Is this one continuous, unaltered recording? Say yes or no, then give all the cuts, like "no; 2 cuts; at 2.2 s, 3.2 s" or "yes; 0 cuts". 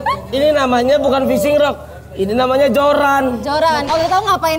yes; 0 cuts